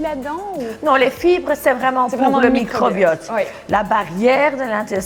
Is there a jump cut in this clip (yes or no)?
no